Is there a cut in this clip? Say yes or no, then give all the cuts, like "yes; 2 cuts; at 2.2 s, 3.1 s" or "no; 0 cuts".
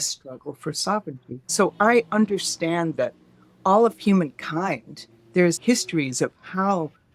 yes; 2 cuts; at 1.3 s, 5.6 s